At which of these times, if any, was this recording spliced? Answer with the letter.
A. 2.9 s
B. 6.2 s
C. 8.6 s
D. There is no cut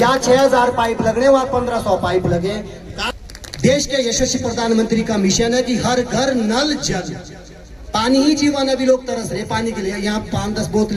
A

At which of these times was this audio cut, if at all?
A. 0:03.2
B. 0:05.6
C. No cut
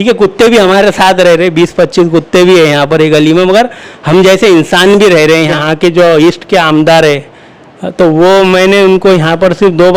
B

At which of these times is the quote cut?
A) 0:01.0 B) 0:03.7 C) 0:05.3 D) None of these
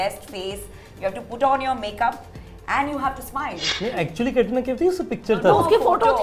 B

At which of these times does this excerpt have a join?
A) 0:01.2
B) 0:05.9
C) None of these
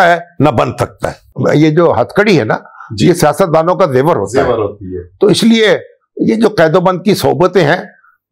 A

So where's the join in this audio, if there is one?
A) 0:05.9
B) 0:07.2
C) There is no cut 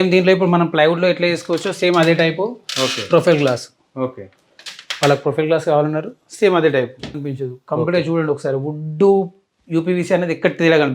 B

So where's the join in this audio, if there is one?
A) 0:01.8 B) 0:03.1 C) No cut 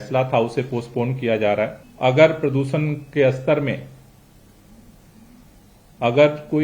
A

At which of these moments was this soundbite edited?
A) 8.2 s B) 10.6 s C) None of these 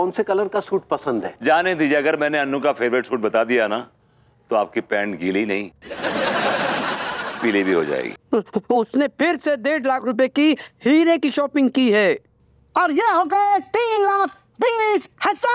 A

